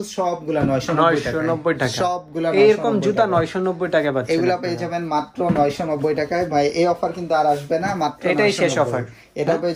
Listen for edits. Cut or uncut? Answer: uncut